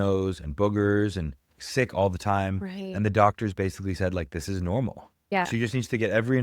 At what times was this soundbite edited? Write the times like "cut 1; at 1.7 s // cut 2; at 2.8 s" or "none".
cut 1; at 5.4 s